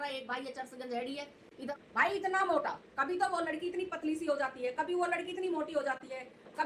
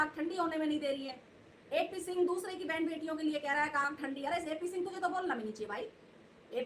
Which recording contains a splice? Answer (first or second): first